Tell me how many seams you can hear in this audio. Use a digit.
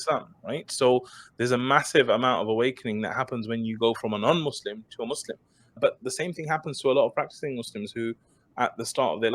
1